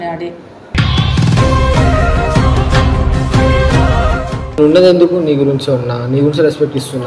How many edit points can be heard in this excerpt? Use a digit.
1